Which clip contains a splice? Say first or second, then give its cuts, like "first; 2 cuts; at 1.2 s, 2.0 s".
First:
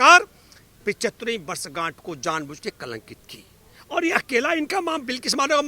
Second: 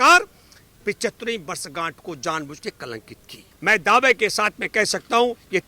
second; 1 cut; at 3.5 s